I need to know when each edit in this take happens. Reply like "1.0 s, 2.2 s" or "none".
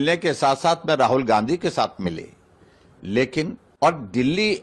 3.6 s